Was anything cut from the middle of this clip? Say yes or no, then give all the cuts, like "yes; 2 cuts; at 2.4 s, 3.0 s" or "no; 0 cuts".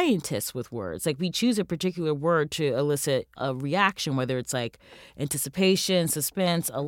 yes; 1 cut; at 3.3 s